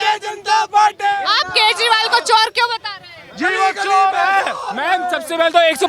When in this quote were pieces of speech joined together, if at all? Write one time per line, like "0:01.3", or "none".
none